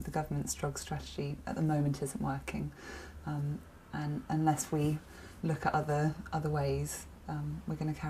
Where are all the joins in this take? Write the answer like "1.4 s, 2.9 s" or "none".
none